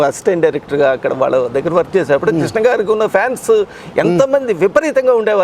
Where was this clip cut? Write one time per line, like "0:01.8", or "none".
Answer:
none